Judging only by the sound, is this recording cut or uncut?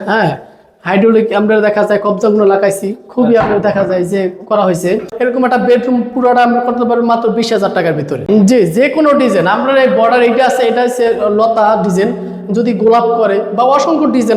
cut